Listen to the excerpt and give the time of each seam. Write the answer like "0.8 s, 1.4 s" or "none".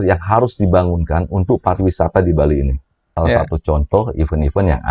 3.1 s